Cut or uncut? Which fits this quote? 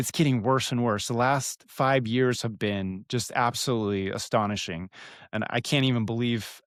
uncut